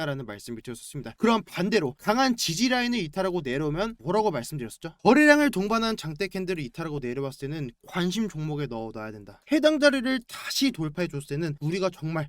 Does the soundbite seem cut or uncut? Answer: cut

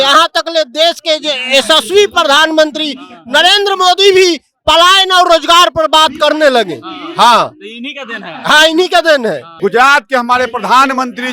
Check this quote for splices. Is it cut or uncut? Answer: cut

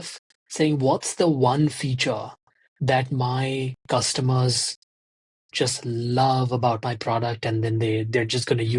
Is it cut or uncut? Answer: uncut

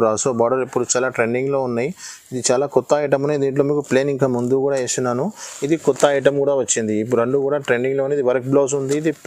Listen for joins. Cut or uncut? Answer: uncut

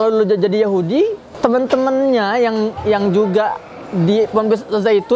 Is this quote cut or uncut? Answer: cut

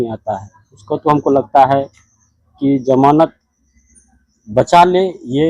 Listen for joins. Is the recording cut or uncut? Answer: uncut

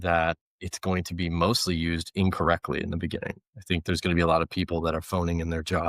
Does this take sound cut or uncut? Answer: uncut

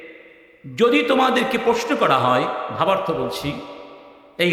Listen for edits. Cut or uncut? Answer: uncut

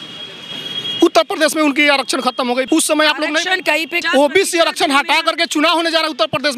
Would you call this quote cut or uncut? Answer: cut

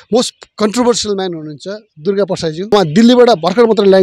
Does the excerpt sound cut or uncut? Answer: cut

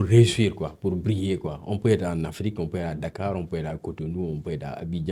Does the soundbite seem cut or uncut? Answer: uncut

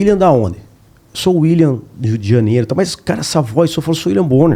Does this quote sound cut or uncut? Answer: uncut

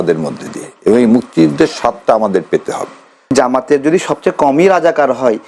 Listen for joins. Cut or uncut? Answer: cut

